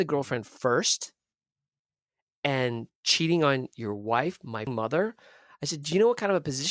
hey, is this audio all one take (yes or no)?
no